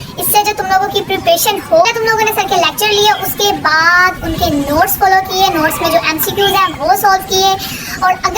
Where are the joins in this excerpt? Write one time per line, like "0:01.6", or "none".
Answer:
0:01.9